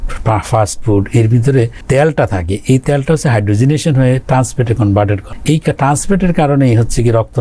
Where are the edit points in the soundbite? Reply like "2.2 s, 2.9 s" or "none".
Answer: 1.8 s, 5.3 s